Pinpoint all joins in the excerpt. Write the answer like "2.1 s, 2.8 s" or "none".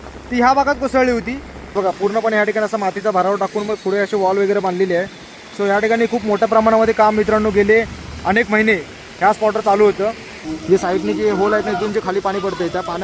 1.6 s, 10.4 s